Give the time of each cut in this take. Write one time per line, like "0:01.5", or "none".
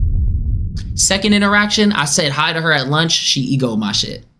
none